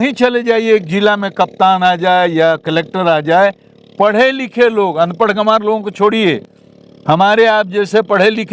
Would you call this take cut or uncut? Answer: uncut